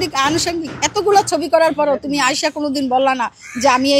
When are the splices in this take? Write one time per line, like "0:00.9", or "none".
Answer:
none